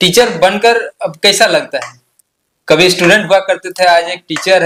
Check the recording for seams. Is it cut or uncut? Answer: uncut